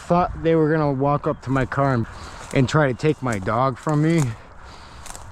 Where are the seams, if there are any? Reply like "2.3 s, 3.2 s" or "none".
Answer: 2.1 s

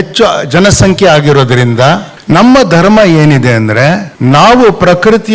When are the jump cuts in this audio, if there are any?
2.1 s, 4.1 s

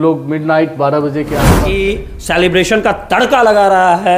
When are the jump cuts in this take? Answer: 1.8 s

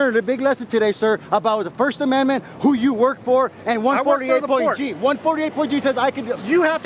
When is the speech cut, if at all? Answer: none

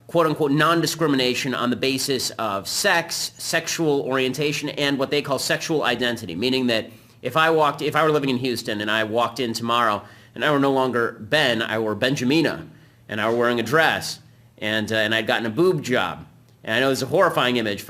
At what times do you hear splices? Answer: 5.9 s

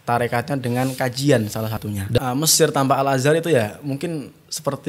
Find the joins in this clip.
2.0 s

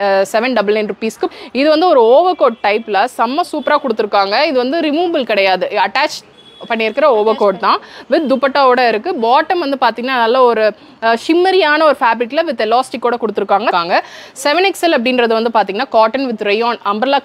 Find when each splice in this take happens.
1.3 s, 13.7 s

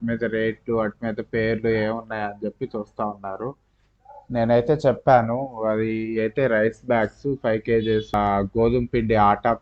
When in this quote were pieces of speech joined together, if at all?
8.1 s

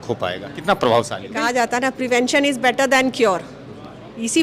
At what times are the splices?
1.3 s

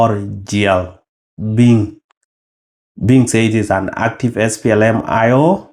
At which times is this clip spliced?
none

